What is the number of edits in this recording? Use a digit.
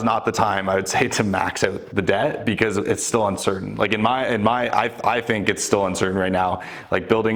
0